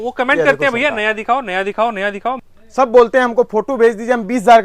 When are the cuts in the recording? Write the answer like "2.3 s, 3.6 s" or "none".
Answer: 2.4 s